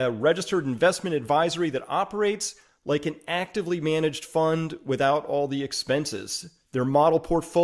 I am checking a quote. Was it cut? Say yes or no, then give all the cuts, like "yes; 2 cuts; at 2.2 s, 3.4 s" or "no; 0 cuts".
no; 0 cuts